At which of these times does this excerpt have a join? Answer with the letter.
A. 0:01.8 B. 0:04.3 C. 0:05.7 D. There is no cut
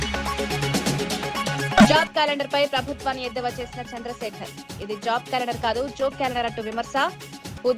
A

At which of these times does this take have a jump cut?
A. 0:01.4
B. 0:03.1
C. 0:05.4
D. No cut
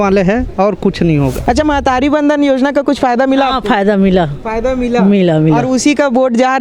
A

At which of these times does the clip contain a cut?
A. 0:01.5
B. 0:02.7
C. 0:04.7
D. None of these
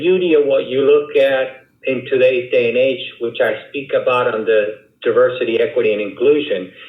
D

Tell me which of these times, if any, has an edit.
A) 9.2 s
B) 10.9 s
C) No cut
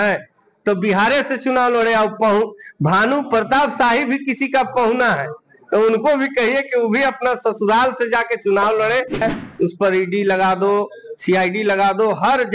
A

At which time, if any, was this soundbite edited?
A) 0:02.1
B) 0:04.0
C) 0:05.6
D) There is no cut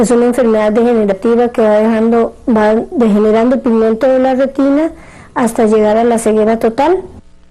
D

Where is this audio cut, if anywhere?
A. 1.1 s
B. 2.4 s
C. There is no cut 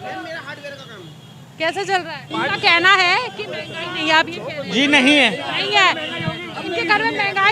B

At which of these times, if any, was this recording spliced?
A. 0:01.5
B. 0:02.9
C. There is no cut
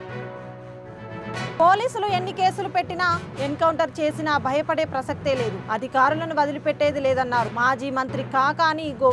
A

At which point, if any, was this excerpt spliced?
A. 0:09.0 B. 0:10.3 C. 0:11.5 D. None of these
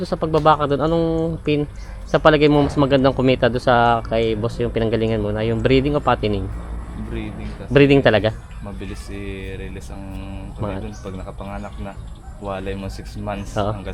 D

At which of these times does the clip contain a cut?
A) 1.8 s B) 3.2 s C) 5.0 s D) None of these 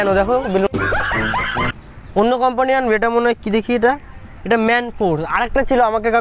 A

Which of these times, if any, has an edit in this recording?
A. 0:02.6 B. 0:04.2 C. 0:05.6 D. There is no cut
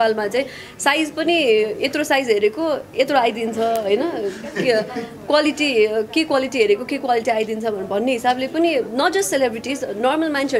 D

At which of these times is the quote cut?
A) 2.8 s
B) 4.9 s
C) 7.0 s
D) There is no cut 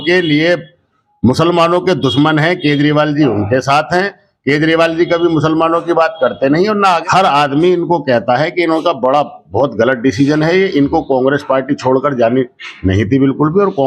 C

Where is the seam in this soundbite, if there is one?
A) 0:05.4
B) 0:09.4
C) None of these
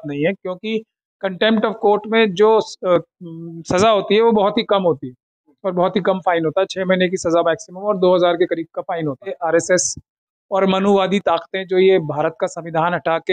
B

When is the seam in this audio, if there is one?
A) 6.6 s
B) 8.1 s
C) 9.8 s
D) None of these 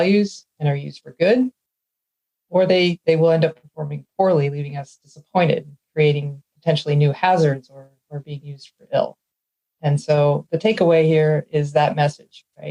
D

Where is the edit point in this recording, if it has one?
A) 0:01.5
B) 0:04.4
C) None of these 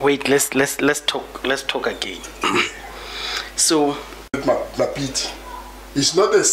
B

